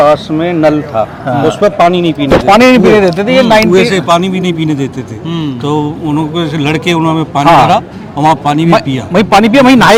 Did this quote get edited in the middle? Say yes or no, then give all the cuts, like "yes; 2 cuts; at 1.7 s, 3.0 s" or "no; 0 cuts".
no; 0 cuts